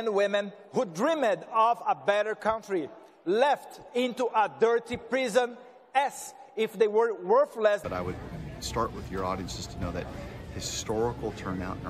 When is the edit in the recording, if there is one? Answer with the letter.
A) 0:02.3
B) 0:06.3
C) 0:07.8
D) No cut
C